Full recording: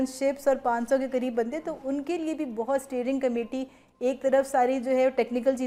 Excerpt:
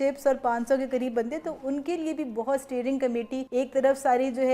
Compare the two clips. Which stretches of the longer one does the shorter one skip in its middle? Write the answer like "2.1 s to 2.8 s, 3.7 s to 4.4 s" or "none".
3.6 s to 3.9 s

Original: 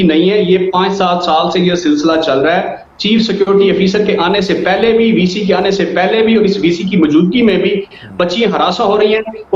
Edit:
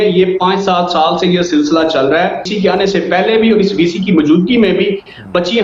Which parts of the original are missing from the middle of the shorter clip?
2.8 s to 5.4 s

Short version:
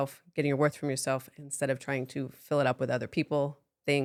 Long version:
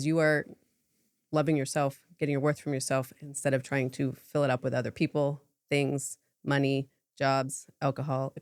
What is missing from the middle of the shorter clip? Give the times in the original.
none

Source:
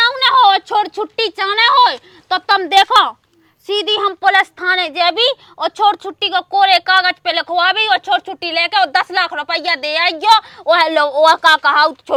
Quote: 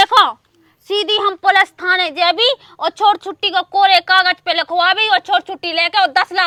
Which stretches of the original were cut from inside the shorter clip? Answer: none

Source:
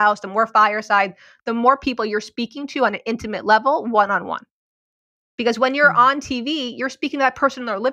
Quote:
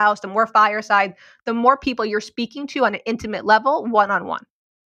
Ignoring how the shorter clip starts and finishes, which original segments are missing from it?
none

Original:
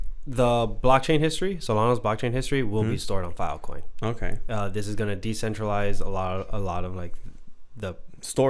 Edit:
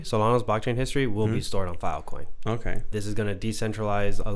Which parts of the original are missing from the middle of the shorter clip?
4.5 s to 4.7 s

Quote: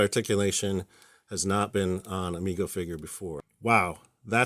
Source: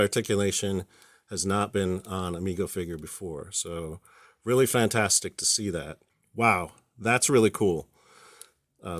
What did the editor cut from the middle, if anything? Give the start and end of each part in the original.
3.5 s to 6.2 s

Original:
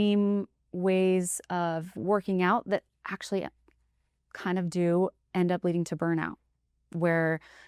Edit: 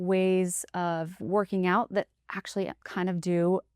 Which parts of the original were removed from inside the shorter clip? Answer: 3.6 s to 4.3 s

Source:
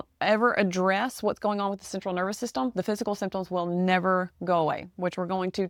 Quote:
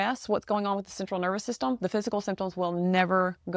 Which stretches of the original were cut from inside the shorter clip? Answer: none

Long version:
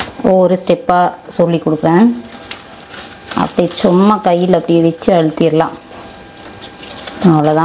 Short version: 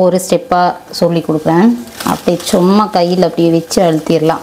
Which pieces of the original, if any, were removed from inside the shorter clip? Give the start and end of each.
2.3 s to 3.2 s

